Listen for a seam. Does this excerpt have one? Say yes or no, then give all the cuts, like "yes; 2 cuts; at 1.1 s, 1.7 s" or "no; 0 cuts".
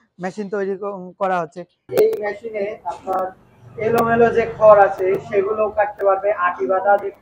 yes; 1 cut; at 1.9 s